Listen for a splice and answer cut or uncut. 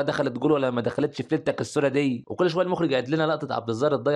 cut